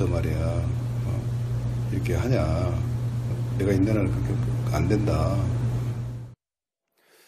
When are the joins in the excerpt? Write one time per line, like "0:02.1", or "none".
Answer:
none